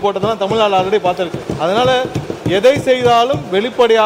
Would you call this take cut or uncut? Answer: cut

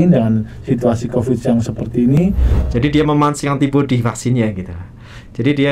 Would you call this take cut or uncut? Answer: cut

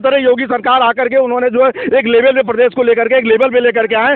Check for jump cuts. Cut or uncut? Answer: uncut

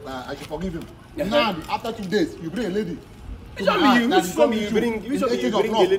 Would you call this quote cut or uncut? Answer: uncut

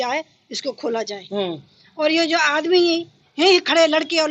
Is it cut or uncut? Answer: uncut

